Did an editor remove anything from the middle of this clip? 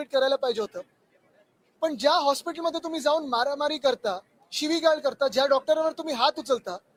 no; 0 cuts

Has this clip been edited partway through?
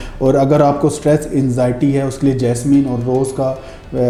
no; 0 cuts

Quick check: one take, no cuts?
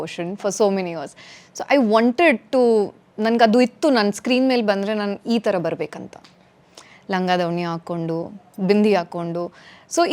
yes; 0 cuts

